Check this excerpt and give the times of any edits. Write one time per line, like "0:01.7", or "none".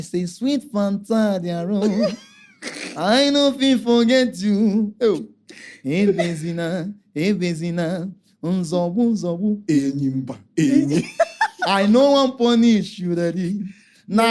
none